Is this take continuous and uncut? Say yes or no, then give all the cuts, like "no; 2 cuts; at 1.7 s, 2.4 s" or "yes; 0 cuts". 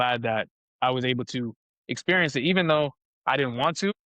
yes; 0 cuts